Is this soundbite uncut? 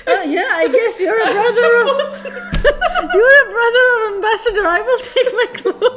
yes; 0 cuts

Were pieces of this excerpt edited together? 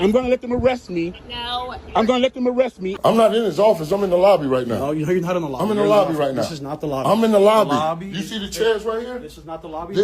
yes; 1 cut; at 2.8 s

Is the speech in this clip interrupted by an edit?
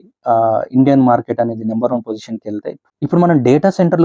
yes; 1 cut; at 2.7 s

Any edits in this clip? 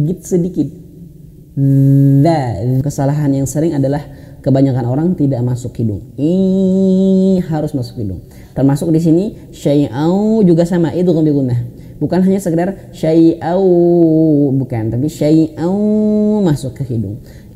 yes; 1 cut; at 2.8 s

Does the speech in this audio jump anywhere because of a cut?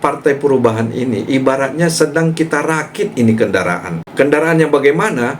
yes; 1 cut; at 3.9 s

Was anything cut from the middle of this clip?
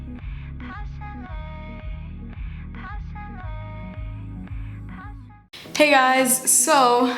yes; 1 cut; at 0.9 s

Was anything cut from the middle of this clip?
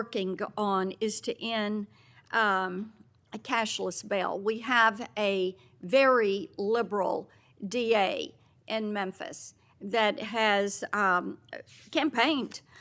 no; 0 cuts

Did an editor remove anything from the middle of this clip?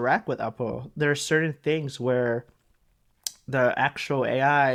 no; 0 cuts

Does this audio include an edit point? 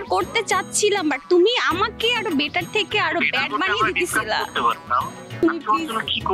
yes; 1 cut; at 5.4 s

